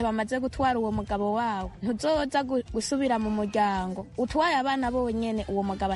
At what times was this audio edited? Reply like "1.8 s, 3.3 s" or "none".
none